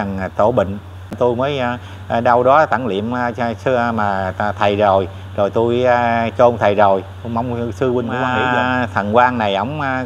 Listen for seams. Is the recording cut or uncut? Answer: cut